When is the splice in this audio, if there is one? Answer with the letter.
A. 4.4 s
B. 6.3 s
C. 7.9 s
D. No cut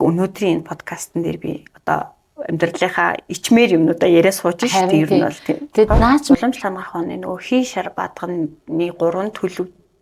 B